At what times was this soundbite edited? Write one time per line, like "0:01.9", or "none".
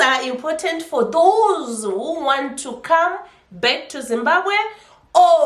none